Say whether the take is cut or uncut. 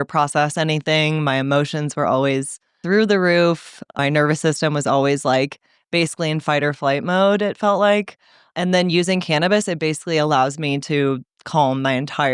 cut